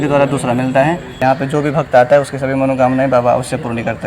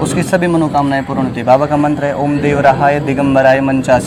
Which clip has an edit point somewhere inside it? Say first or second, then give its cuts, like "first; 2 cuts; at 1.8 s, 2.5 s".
first; 1 cut; at 1.1 s